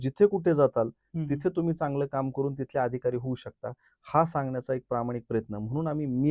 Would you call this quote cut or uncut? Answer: uncut